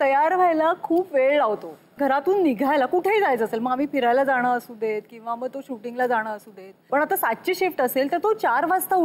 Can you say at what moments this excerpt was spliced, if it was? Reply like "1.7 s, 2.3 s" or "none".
1.8 s, 6.9 s

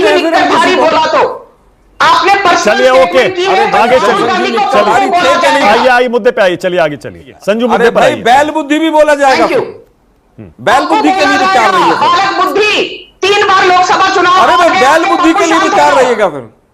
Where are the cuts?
none

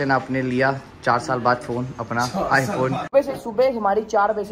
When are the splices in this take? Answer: 3.0 s

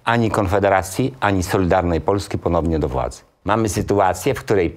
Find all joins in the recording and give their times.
3.3 s

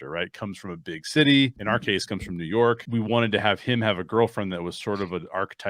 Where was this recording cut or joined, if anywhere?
1.6 s, 2.8 s

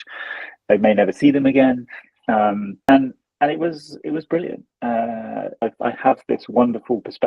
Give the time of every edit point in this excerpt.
5.6 s

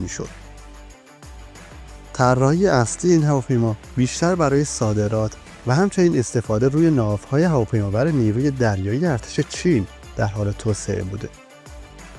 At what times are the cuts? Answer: 11.3 s

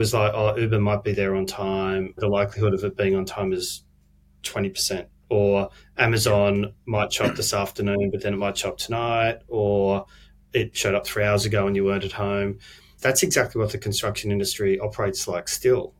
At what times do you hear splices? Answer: none

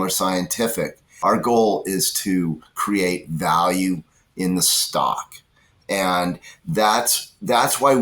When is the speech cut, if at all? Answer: 1.0 s

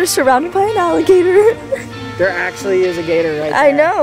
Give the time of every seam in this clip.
none

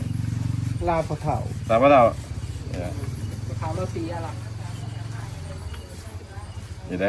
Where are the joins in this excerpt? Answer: 1.0 s

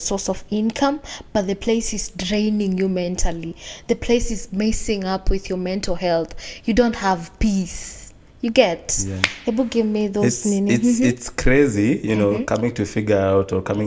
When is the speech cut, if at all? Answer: none

